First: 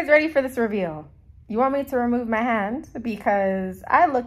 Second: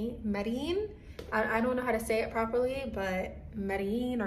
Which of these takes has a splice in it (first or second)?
first